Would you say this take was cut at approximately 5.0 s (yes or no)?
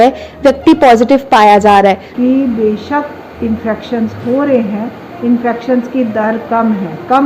no